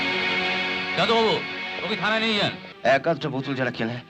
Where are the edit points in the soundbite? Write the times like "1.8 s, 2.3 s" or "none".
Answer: 2.7 s